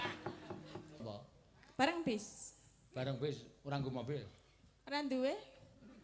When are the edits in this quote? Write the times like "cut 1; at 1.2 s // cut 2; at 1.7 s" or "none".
cut 1; at 1.0 s